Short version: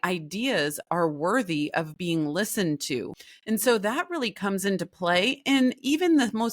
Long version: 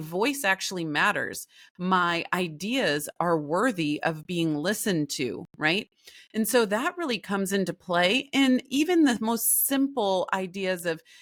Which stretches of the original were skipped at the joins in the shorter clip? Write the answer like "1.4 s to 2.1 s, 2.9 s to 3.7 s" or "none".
5.5 s to 6.0 s